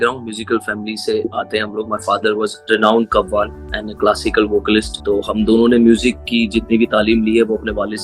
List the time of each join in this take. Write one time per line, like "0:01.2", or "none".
0:01.2
0:02.6
0:04.9